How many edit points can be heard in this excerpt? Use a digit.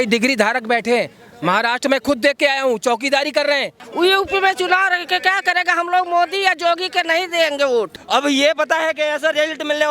2